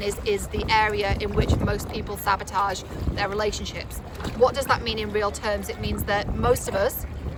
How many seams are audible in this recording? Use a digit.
0